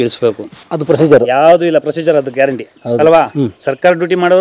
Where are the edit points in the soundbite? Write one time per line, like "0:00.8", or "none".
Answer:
none